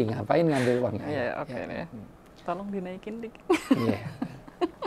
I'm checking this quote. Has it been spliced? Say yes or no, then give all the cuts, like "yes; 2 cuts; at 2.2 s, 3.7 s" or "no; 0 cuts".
no; 0 cuts